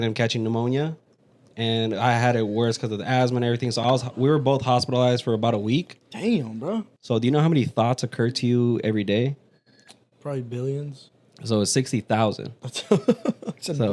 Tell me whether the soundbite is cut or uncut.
cut